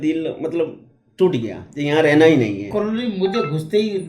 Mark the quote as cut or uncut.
cut